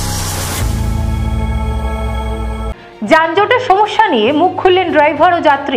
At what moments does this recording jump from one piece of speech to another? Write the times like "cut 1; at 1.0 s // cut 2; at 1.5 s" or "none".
cut 1; at 2.7 s